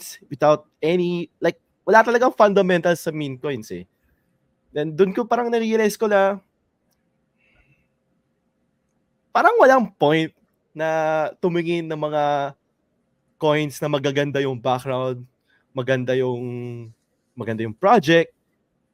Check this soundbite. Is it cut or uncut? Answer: uncut